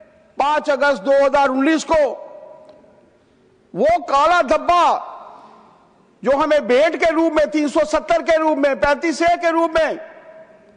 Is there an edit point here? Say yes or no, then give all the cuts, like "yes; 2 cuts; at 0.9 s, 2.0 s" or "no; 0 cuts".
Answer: no; 0 cuts